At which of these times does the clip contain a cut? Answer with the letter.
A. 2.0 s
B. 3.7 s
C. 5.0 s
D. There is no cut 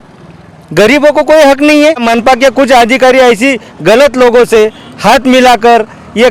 A